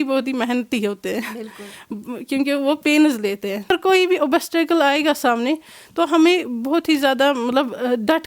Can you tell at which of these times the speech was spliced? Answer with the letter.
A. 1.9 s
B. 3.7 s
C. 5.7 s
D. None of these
B